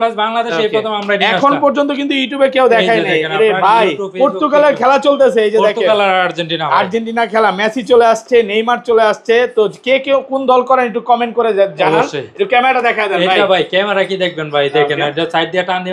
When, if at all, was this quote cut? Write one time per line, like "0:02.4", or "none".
none